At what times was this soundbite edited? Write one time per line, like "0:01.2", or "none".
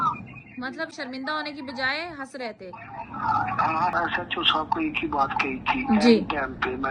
0:03.9

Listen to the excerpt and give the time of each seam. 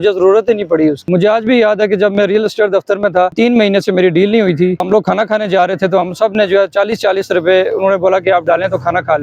0:01.1
0:03.3
0:04.8

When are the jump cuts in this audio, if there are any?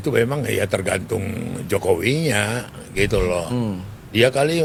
none

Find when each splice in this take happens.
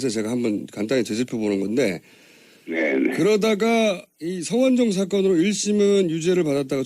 0:02.3

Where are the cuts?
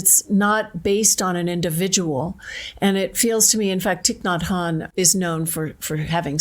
0:04.9

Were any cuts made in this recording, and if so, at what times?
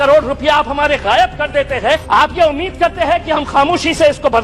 0:02.0

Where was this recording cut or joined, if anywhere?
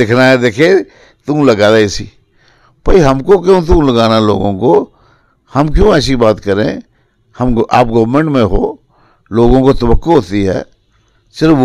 none

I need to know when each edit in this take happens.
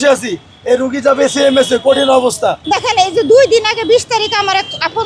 0:02.6

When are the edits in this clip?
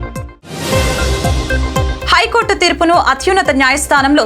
0:02.0

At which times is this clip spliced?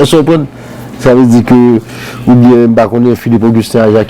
none

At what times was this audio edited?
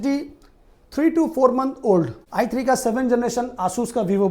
0:02.2

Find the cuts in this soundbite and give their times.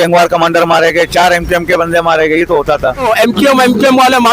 0:03.0

